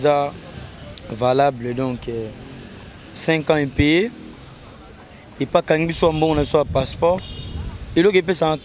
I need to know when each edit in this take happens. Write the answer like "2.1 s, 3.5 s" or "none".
none